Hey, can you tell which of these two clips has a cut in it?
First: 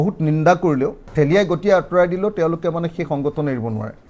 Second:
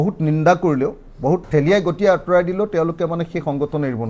first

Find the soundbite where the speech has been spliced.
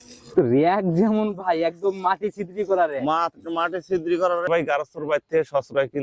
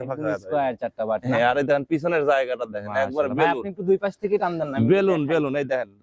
first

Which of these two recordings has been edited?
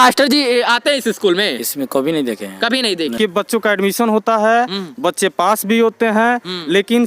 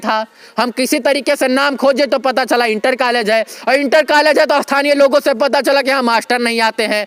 first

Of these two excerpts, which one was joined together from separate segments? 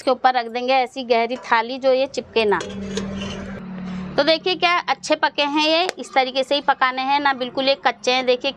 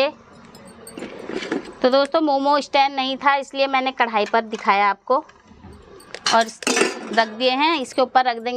first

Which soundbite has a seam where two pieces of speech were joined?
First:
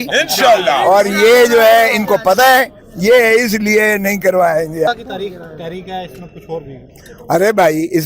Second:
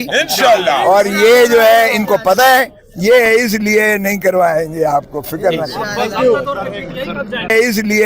first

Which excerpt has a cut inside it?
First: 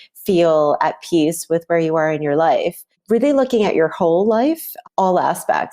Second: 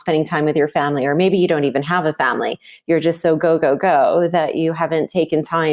first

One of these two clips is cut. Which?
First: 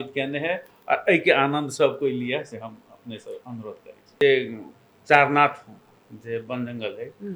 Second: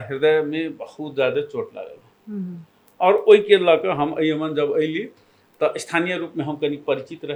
first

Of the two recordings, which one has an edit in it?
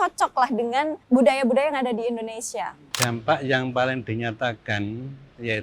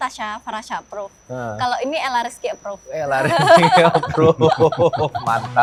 first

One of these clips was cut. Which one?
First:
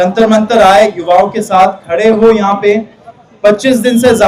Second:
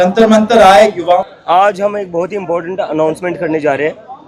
second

